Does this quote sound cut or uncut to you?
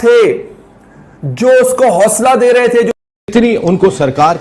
cut